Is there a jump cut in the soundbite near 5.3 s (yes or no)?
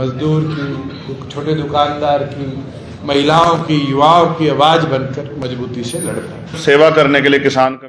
no